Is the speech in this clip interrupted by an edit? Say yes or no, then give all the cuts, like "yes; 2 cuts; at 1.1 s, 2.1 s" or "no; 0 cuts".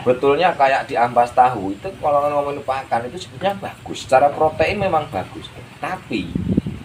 no; 0 cuts